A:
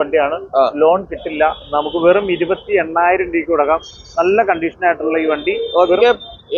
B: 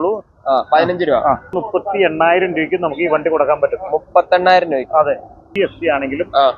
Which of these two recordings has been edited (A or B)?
B